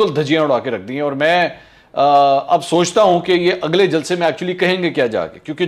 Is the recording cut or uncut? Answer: uncut